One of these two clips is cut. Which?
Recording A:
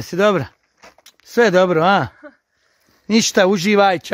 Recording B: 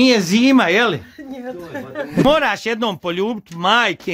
B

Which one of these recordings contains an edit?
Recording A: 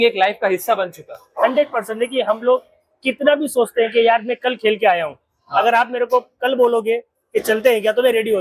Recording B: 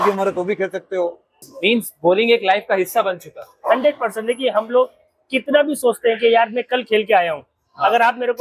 B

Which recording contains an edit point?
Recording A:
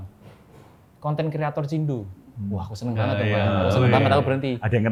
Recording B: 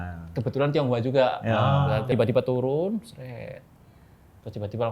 B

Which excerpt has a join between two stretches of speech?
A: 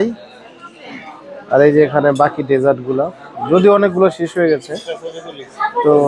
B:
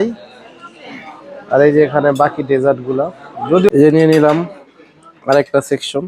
B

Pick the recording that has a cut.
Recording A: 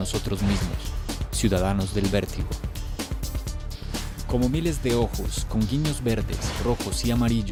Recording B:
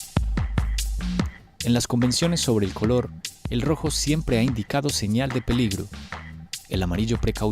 B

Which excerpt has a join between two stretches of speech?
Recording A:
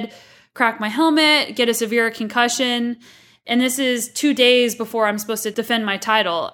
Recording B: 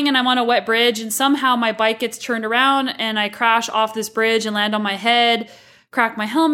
A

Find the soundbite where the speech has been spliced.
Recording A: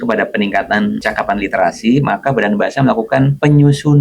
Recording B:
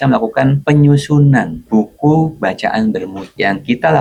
A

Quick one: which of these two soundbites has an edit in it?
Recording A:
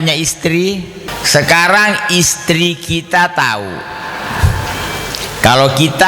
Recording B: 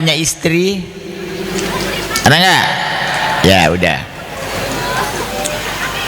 A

